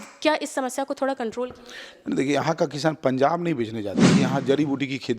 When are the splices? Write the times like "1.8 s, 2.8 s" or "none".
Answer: 4.1 s